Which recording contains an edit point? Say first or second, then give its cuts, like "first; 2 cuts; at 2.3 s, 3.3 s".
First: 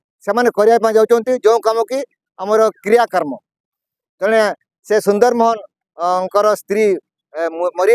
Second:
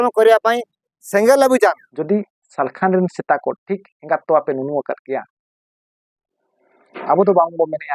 second; 1 cut; at 1.9 s